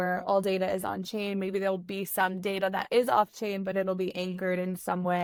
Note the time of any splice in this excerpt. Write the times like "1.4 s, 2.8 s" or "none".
none

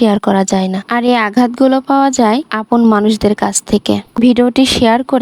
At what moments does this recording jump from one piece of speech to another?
4.1 s

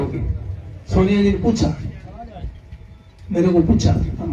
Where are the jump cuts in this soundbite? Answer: none

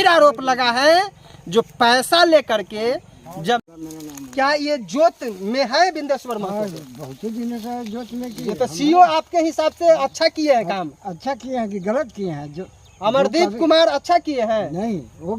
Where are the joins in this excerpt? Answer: 3.7 s

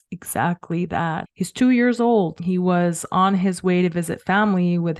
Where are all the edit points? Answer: 1.3 s, 2.4 s

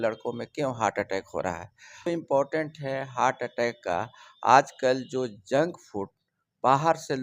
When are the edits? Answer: 2.1 s

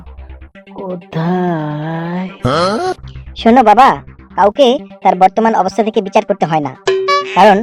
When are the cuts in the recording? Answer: 3.1 s

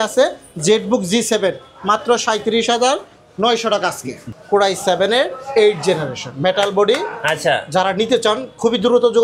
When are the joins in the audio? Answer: 4.2 s

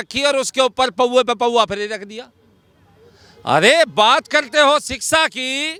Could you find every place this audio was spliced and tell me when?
none

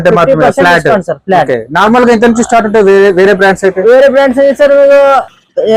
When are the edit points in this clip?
none

